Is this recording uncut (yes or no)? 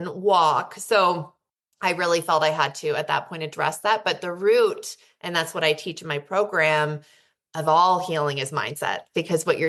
yes